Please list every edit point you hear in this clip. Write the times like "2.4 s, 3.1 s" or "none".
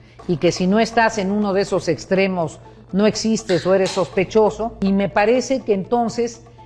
4.7 s

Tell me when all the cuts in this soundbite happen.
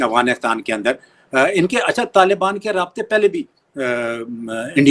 none

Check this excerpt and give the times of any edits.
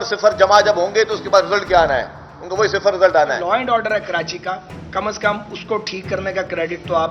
3.4 s

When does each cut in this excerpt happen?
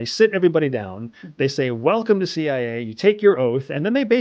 none

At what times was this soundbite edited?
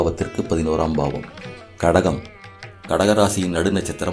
1.6 s

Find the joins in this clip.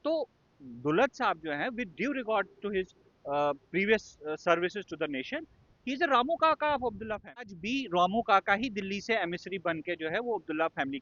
7.6 s

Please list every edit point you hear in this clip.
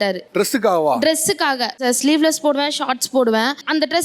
1.8 s

